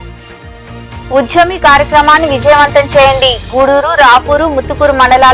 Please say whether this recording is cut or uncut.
cut